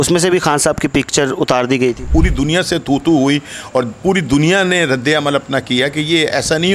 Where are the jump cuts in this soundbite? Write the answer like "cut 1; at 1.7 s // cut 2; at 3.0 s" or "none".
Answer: cut 1; at 2.1 s